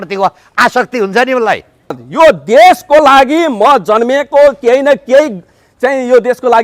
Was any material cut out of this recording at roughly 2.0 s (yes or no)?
yes